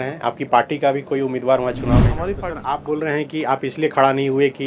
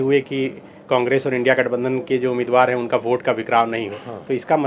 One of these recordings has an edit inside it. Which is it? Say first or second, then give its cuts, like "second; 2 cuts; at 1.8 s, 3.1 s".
first; 1 cut; at 2.2 s